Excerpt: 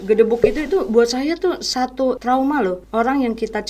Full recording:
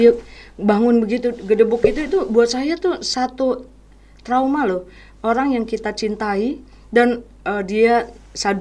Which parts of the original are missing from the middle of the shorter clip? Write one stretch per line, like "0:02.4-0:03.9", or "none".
0:04.1-0:05.0